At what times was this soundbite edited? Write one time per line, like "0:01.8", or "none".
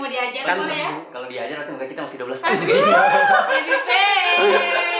none